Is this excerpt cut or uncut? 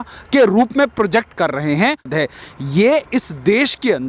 cut